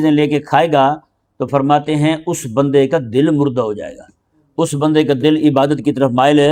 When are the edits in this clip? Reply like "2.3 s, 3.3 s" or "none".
none